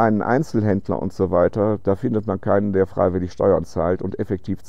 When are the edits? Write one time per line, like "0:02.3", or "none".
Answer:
none